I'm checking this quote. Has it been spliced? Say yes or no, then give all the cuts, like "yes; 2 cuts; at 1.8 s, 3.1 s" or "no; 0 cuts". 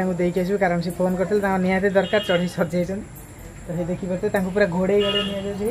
no; 0 cuts